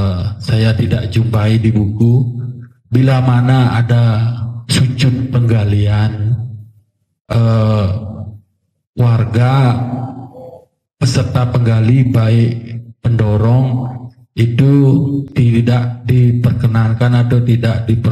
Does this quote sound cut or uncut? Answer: uncut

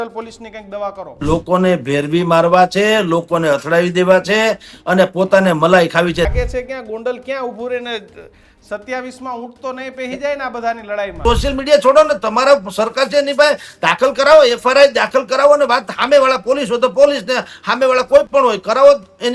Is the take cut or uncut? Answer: cut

